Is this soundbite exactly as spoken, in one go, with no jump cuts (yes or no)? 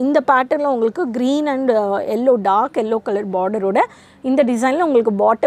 yes